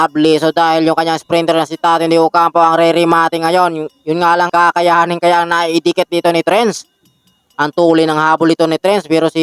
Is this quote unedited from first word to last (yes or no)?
no